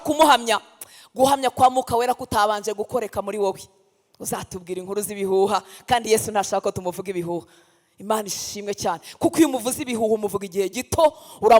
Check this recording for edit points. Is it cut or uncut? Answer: uncut